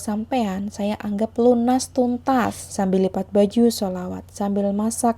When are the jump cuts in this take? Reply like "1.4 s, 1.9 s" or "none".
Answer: 2.6 s